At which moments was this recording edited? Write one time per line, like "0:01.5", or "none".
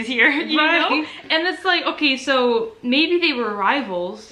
none